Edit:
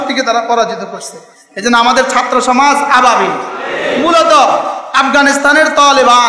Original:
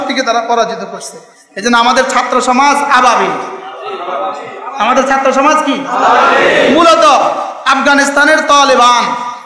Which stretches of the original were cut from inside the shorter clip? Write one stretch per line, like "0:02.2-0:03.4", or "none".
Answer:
0:03.8-0:06.5